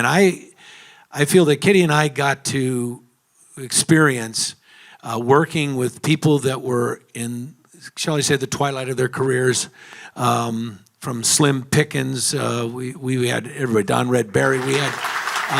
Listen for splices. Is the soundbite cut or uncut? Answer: uncut